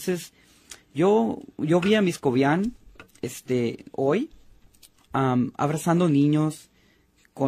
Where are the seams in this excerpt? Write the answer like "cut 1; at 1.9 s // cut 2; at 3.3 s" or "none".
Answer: none